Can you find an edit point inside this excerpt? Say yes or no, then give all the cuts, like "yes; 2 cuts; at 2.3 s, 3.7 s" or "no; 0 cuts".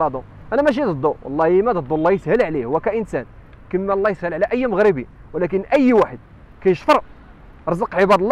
no; 0 cuts